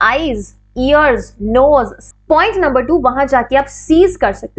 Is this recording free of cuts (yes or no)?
no